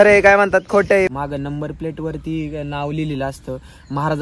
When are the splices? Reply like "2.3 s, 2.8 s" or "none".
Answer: 1.1 s